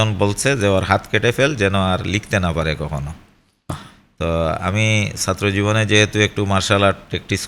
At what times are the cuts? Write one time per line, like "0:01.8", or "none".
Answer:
none